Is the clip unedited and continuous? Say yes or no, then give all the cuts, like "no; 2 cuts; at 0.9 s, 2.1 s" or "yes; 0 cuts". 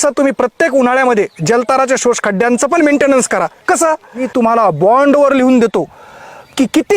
no; 1 cut; at 4.3 s